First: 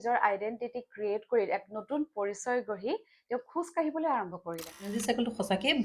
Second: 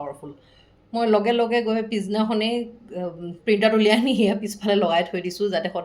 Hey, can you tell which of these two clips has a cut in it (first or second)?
first